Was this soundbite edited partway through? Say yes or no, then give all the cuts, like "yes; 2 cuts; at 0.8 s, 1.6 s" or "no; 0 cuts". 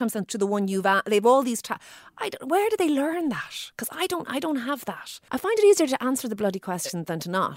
yes; 1 cut; at 5.2 s